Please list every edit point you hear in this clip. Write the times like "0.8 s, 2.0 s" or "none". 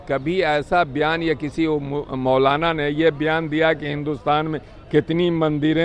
none